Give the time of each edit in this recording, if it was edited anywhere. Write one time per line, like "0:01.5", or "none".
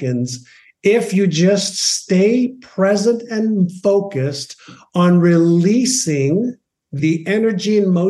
0:07.0